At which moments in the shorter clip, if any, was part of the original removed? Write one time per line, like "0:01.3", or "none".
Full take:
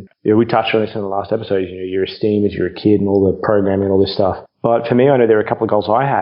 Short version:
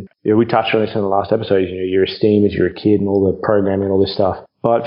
none